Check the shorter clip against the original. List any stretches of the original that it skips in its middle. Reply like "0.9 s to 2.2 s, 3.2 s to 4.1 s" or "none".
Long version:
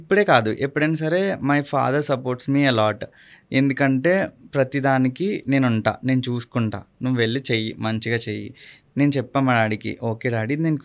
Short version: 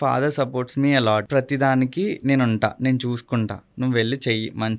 3.0 s to 4.5 s